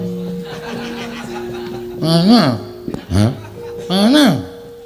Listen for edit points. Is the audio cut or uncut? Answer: uncut